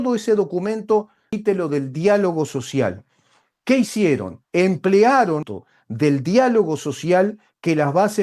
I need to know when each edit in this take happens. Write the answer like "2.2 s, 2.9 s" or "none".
1.3 s, 5.5 s

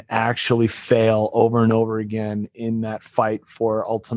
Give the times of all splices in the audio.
none

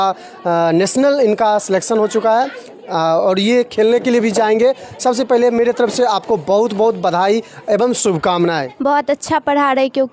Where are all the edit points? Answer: 8.7 s

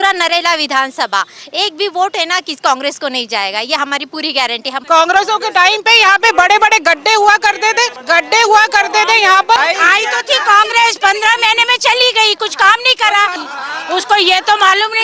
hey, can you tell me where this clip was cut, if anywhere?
4.8 s, 8.0 s, 9.6 s, 13.4 s

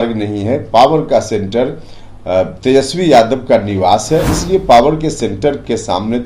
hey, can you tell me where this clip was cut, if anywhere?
4.3 s

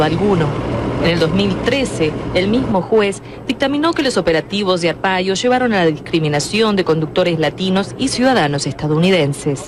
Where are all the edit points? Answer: none

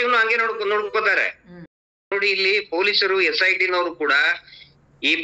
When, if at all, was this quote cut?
2.1 s

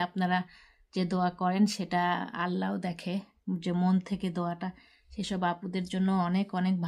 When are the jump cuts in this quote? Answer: none

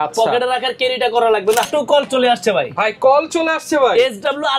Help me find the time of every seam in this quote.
1.7 s

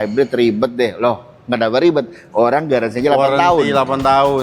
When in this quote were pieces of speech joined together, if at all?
none

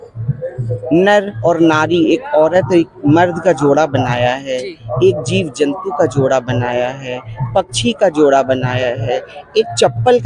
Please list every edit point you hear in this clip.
none

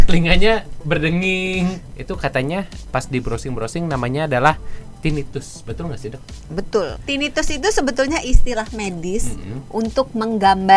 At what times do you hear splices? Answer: 1.9 s, 7.0 s

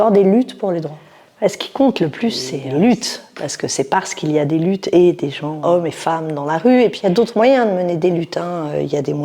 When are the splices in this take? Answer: none

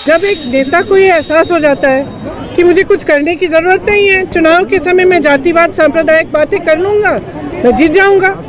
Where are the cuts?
none

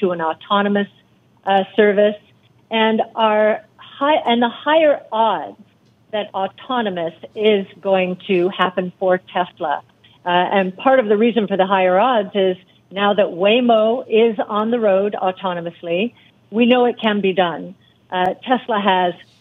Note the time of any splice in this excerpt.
none

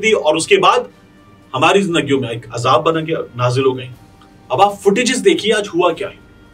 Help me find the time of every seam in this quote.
none

